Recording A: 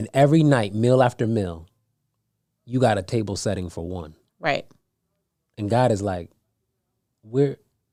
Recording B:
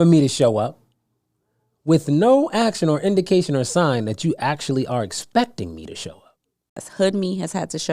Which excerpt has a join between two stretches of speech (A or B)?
B